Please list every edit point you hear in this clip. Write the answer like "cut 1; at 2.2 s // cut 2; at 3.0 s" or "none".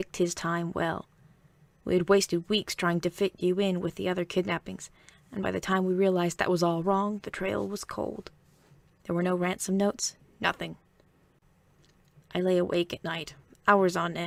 none